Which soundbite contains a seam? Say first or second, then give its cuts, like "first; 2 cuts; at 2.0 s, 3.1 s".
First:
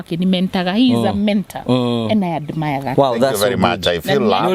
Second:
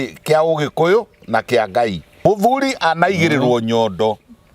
second; 1 cut; at 2.2 s